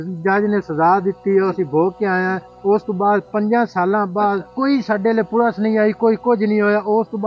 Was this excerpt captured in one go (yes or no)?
no